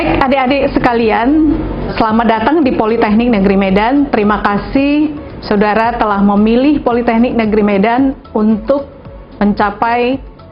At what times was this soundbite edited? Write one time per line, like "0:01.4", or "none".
0:01.9